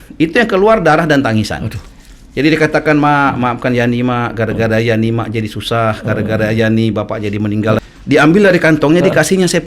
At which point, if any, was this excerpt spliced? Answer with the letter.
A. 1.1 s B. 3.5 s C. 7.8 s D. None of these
C